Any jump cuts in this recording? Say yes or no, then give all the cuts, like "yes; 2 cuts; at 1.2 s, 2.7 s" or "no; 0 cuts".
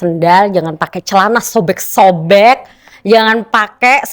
no; 0 cuts